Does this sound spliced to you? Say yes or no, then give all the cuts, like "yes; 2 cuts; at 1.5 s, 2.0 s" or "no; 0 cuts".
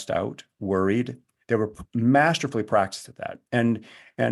no; 0 cuts